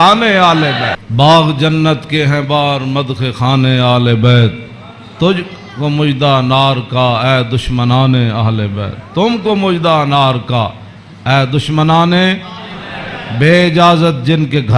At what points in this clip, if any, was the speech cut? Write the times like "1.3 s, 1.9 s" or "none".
1.1 s